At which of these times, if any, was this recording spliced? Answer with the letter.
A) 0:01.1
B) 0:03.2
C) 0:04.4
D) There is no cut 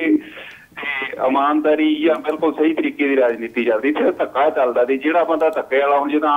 D